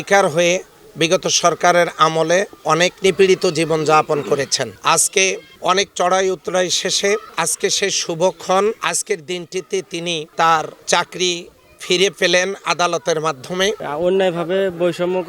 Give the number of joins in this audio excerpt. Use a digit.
1